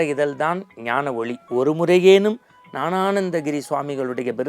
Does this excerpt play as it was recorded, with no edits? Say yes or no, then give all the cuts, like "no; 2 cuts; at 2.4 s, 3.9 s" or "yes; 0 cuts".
no; 1 cut; at 1.4 s